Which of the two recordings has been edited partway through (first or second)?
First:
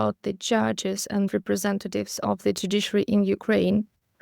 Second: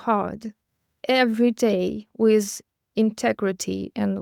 first